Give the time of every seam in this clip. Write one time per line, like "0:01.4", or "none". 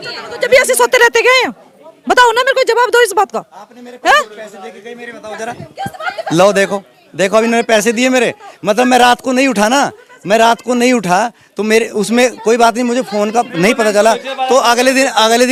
none